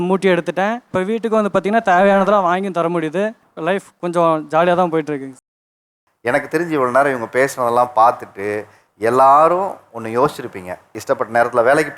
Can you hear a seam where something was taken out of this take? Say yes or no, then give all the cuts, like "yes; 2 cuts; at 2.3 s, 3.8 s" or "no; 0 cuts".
no; 0 cuts